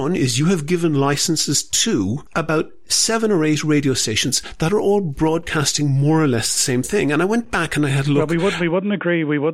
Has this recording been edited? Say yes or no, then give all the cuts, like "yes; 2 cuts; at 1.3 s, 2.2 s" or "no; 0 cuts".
yes; 1 cut; at 2.2 s